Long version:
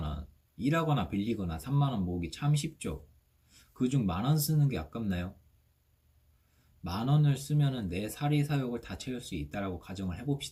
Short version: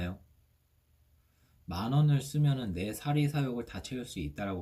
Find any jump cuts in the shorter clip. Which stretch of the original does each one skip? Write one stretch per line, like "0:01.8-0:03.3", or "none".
none